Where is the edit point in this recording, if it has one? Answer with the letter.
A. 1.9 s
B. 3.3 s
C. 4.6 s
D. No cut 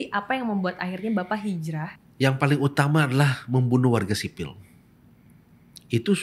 A